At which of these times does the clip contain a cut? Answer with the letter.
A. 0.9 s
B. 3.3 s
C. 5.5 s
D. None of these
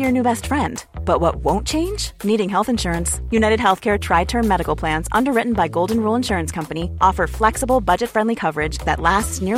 D